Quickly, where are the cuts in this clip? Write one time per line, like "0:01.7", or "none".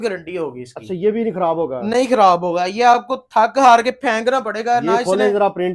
none

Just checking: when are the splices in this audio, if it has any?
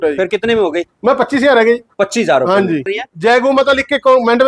0:03.0

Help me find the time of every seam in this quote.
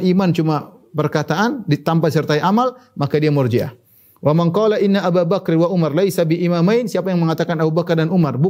none

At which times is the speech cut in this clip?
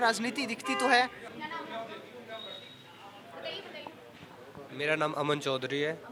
none

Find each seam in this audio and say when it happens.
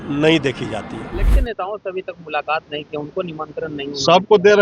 0:01.3

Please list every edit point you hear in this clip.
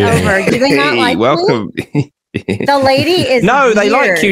none

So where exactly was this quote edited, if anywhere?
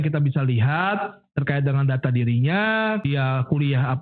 0:03.0

